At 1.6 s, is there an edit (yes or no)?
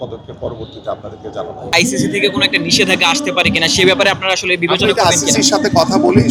no